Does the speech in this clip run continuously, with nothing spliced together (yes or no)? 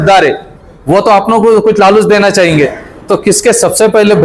yes